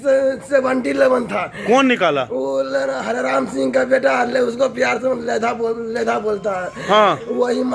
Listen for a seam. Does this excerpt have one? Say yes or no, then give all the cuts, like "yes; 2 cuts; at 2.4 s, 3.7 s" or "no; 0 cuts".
no; 0 cuts